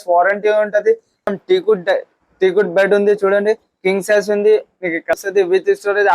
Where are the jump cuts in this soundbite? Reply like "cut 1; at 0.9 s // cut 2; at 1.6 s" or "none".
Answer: cut 1; at 1.2 s // cut 2; at 5.1 s